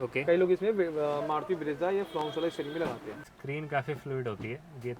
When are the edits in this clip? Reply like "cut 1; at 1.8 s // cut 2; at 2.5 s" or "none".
cut 1; at 3.3 s

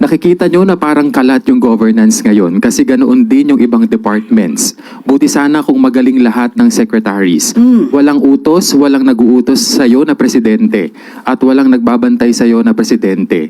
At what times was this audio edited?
none

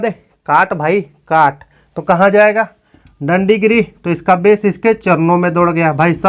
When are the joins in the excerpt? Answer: none

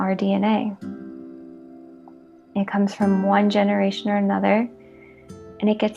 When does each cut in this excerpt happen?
cut 1; at 0.8 s // cut 2; at 2.5 s

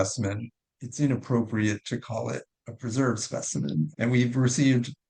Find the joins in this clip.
none

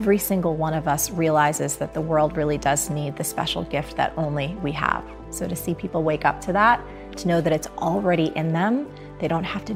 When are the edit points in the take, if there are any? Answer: none

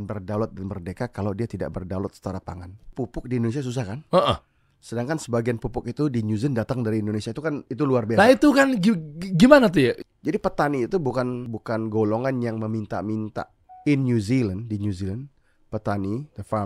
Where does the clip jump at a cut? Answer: cut 1; at 2.9 s // cut 2; at 10.1 s // cut 3; at 11.5 s

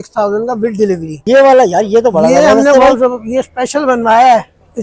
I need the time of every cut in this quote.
cut 1; at 1.2 s

